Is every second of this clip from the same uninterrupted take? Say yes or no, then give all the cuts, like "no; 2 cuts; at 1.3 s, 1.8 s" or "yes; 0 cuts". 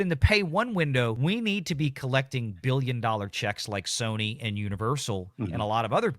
no; 1 cut; at 1.2 s